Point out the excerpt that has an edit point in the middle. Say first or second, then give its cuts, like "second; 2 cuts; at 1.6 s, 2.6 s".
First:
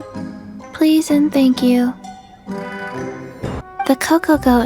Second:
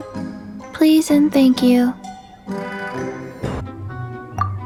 first; 1 cut; at 3.7 s